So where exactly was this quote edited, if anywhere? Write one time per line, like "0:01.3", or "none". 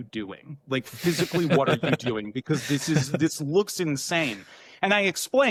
none